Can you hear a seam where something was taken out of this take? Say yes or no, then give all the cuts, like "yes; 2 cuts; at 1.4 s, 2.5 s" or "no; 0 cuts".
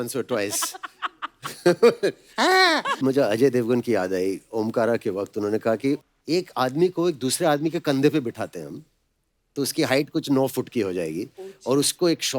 yes; 1 cut; at 3.0 s